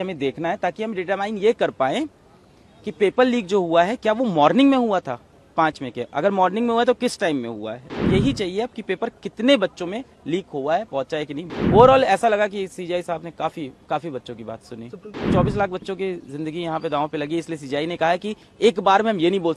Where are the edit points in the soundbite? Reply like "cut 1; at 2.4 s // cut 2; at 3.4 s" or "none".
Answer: cut 1; at 8.0 s // cut 2; at 11.4 s // cut 3; at 15.2 s